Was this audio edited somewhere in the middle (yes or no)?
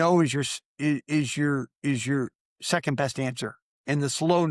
no